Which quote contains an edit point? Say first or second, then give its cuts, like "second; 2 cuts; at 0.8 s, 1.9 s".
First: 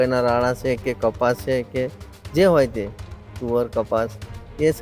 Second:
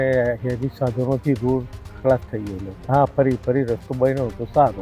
second; 1 cut; at 2.7 s